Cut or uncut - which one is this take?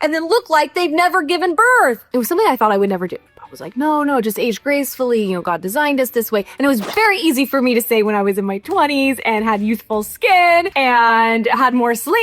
cut